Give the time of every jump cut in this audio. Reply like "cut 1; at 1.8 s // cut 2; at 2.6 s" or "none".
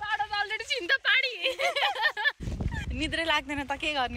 cut 1; at 2.4 s